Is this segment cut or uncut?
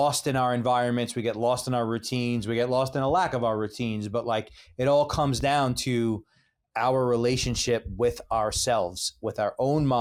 uncut